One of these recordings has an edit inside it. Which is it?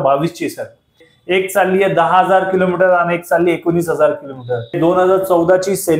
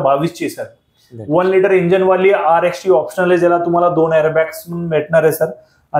first; 2 cuts; at 1.1 s, 4.8 s

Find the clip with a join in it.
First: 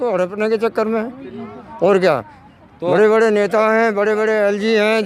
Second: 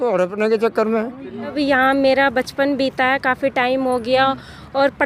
second; 1 cut; at 1.6 s

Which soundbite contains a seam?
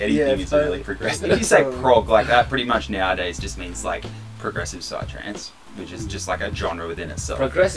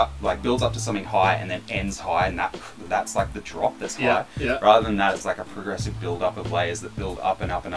first; 1 cut; at 1.2 s

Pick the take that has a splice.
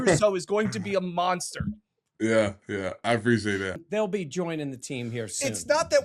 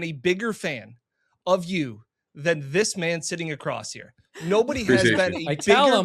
first; 1 cut; at 3.8 s

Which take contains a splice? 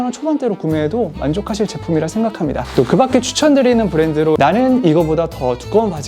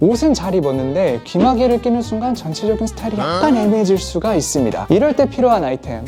first; 1 cut; at 4.4 s

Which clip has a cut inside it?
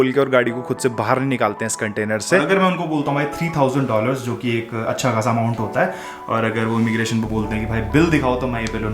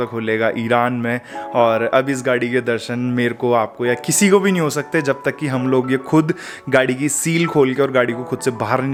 first; 1 cut; at 2.4 s

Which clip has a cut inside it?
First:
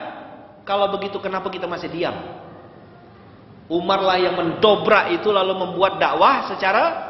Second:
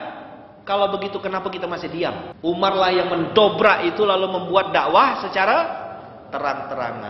second; 1 cut; at 2.3 s

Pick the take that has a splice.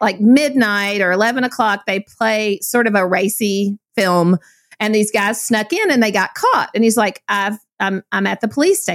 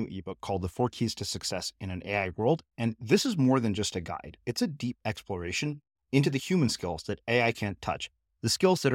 first; 1 cut; at 3.8 s

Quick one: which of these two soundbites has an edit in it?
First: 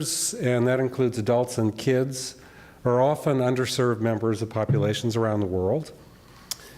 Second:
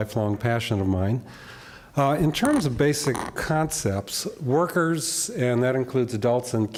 first; 1 cut; at 3.2 s

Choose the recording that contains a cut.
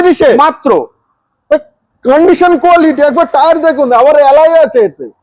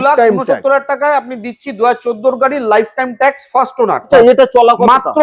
second; 1 cut; at 4.0 s

